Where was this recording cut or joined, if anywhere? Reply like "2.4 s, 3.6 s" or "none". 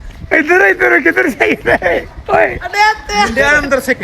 none